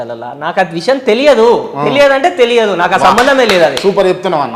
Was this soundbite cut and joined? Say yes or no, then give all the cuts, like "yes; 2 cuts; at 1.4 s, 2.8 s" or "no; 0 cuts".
no; 0 cuts